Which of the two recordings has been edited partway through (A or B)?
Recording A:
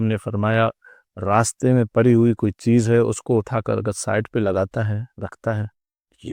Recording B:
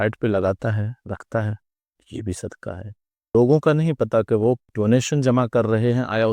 B